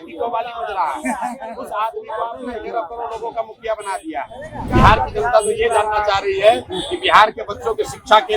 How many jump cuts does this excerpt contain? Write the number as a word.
one